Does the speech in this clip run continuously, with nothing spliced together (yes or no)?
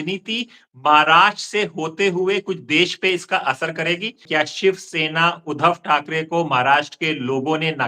no